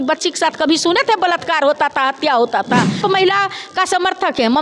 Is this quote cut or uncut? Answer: cut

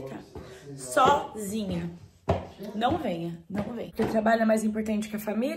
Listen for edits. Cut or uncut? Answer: cut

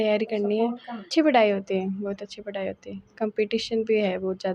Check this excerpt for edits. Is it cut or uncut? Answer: cut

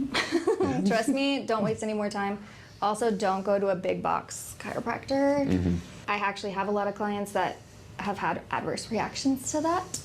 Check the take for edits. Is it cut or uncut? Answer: cut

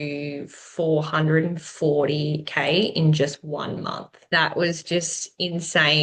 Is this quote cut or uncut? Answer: cut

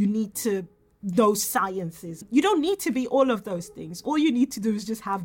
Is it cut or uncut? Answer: cut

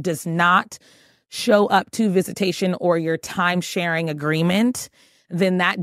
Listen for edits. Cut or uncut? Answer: uncut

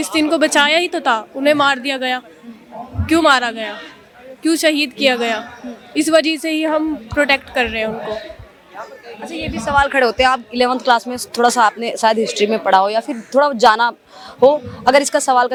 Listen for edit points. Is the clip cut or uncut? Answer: uncut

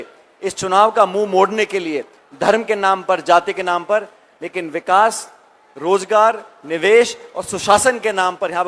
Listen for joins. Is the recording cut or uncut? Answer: uncut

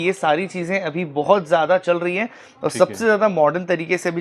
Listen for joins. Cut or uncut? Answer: uncut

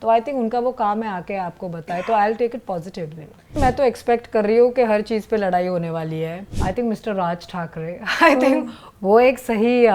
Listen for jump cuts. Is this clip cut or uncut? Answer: cut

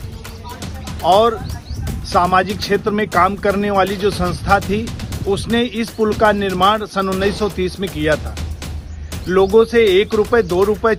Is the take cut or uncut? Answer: uncut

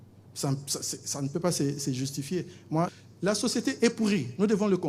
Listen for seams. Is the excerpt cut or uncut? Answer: cut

